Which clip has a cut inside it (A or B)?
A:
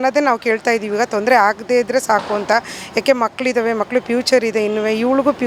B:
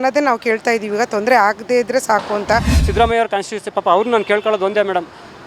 B